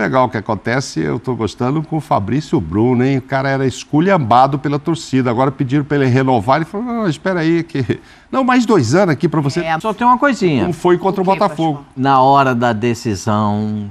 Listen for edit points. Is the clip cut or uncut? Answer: cut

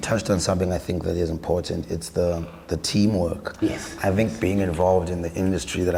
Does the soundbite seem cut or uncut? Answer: uncut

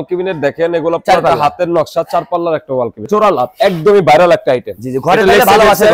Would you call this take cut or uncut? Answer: cut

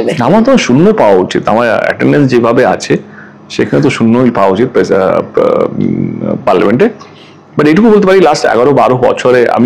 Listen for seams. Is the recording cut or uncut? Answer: uncut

